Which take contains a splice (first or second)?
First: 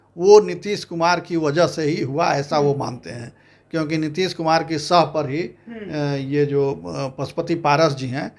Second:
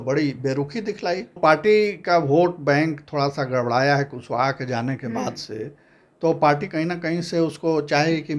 second